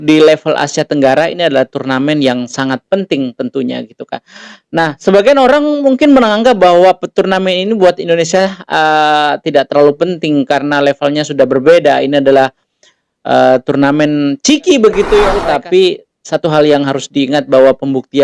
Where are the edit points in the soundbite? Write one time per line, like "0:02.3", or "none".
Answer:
0:15.4